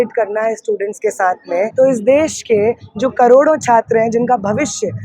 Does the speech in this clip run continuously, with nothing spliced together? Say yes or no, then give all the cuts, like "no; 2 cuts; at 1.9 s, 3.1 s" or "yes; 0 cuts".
no; 1 cut; at 1.7 s